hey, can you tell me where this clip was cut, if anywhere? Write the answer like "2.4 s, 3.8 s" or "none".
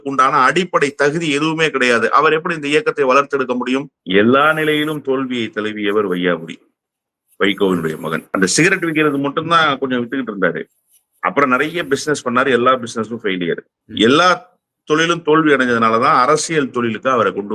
4.0 s, 8.2 s, 13.8 s